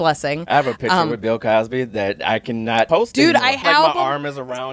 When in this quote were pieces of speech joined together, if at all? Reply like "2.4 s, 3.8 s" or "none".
2.9 s, 3.6 s